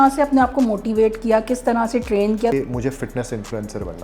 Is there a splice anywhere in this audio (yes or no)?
yes